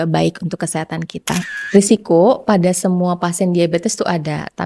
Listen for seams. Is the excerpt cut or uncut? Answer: cut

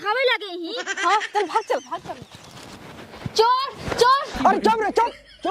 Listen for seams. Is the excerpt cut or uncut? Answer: cut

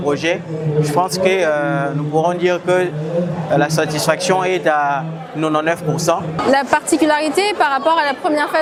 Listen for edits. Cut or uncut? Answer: uncut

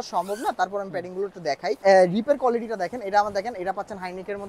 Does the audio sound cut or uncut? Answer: cut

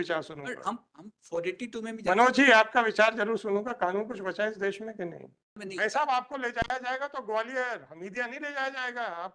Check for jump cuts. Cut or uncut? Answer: cut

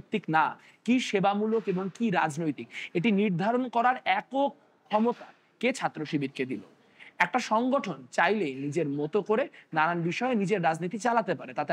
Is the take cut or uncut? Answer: uncut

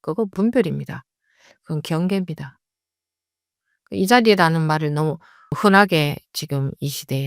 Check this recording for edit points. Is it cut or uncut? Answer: cut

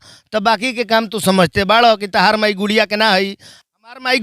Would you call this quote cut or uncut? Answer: uncut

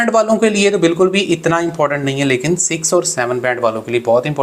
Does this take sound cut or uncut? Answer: uncut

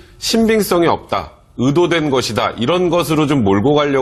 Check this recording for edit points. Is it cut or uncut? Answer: uncut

